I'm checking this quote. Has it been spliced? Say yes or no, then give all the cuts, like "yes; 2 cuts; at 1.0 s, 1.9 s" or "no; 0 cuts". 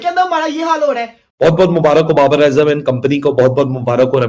yes; 1 cut; at 1.2 s